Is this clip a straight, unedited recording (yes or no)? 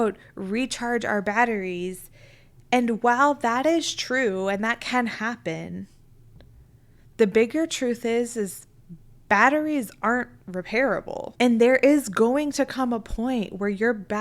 no